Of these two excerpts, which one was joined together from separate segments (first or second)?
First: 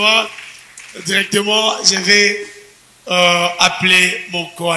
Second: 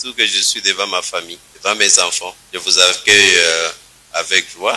second